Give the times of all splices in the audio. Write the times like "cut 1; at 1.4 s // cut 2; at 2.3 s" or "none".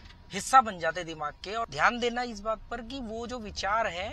cut 1; at 1.7 s

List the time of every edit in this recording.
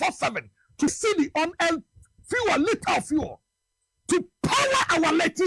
cut 1; at 0.9 s

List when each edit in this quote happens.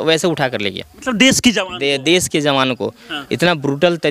none

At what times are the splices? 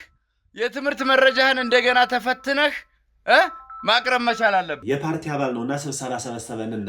cut 1; at 4.8 s

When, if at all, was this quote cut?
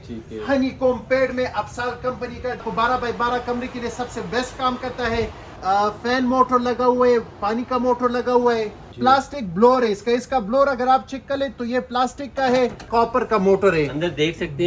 cut 1; at 2.6 s // cut 2; at 5.4 s // cut 3; at 8.8 s // cut 4; at 12.8 s

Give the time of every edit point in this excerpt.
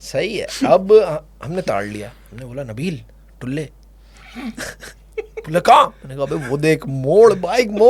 none

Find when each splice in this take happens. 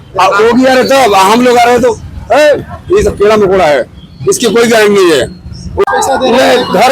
cut 1; at 5.8 s

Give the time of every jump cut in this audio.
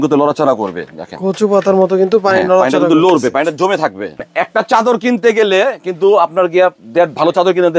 cut 1; at 4.3 s

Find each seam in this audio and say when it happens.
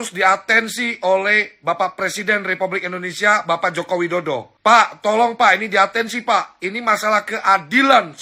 none

